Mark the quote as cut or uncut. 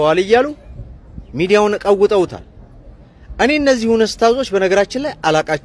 uncut